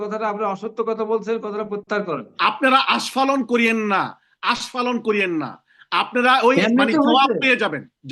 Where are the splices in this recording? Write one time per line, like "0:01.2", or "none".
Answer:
0:02.3